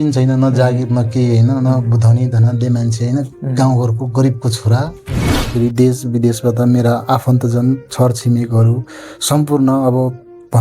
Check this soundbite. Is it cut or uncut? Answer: cut